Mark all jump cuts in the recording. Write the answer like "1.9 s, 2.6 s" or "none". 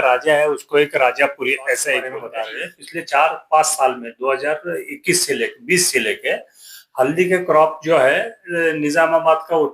2.2 s